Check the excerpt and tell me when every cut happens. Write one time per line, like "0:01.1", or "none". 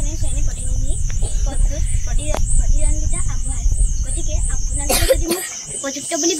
none